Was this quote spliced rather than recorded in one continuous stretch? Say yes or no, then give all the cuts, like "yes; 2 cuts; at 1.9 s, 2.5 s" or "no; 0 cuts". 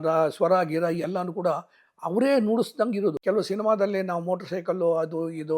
yes; 1 cut; at 3.2 s